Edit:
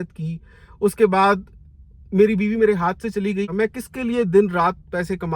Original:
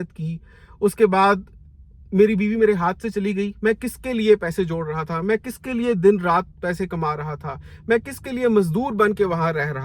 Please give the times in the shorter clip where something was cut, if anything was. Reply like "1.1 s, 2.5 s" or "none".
3.5 s

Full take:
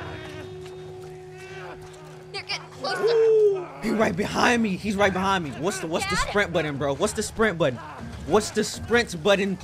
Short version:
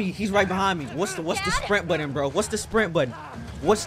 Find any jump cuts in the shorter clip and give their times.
none

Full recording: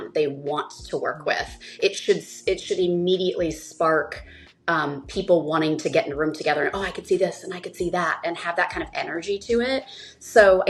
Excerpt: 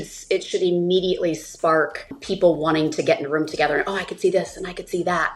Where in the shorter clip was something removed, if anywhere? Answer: 2.2 s

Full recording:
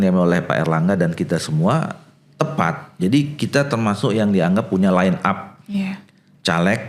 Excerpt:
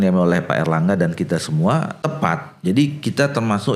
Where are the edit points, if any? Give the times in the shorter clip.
2.0 s

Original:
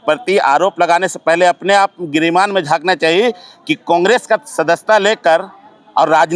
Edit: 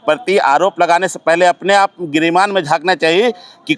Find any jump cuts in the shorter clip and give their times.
none

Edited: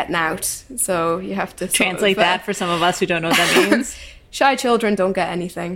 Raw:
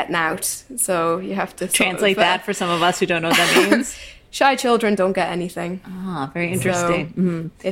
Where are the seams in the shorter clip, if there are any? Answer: none

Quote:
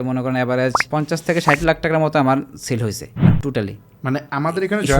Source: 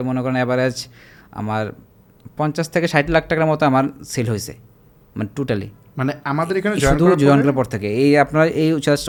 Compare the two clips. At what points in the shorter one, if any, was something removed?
0.8 s, 3.1 s

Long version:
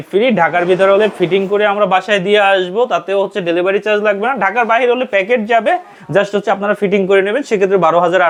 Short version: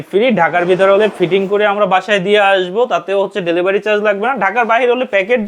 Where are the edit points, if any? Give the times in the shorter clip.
none

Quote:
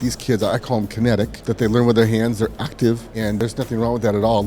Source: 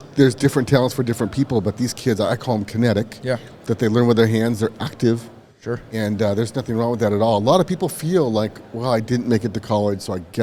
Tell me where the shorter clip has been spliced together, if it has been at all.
1.4 s, 3.4 s

